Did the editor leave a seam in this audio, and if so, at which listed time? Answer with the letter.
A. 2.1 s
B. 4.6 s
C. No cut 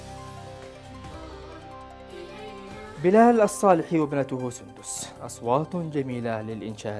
A